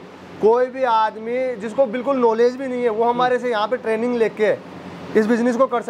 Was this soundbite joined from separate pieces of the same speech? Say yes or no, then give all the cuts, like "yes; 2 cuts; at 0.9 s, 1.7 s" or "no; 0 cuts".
no; 0 cuts